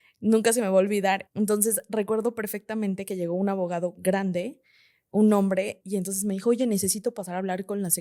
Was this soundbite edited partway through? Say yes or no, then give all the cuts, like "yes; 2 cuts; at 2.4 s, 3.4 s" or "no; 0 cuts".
yes; 2 cuts; at 1.3 s, 5.8 s